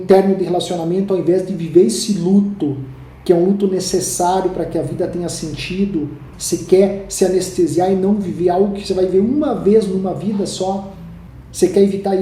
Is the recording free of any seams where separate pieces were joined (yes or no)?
no